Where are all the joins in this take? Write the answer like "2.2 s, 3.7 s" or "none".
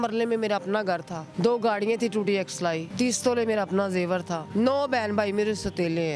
1.2 s, 2.9 s, 4.4 s